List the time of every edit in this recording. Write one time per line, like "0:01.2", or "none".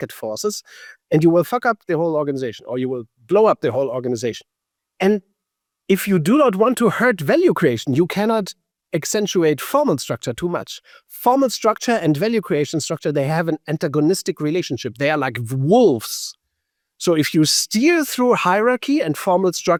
none